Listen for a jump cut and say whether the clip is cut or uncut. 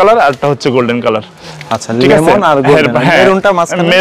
uncut